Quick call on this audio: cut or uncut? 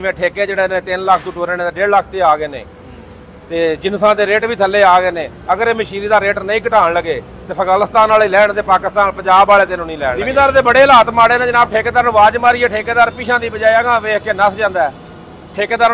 cut